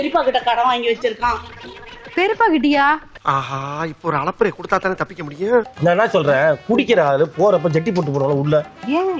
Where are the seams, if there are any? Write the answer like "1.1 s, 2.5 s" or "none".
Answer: 5.7 s